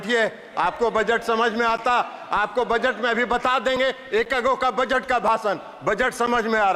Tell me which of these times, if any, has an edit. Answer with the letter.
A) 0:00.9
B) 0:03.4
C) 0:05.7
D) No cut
D